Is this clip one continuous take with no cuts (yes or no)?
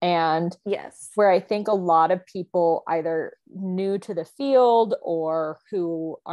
yes